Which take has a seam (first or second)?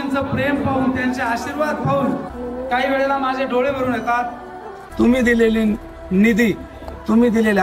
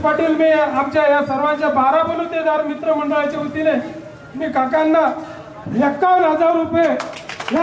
first